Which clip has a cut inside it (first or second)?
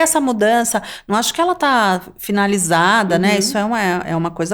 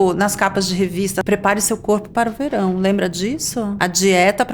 second